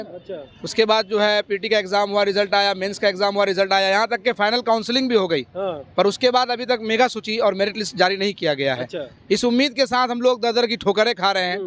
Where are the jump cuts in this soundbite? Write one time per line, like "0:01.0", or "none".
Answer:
none